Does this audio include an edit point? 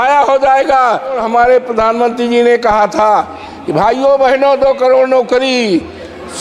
yes; 1 cut; at 1.2 s

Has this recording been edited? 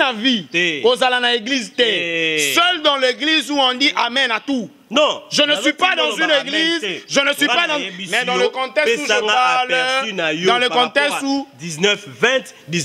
no; 0 cuts

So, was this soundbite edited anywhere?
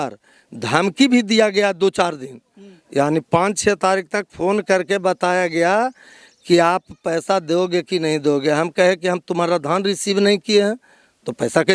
no; 0 cuts

